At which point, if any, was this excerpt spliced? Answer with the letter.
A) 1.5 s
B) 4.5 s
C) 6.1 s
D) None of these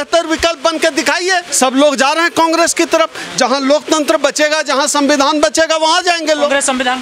A